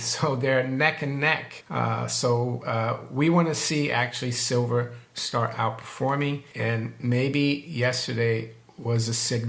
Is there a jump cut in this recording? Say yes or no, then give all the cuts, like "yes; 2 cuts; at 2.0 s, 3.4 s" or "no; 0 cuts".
yes; 2 cuts; at 1.5 s, 6.5 s